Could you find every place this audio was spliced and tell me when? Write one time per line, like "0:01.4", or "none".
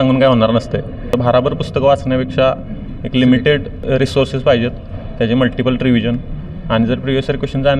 0:01.0
0:03.7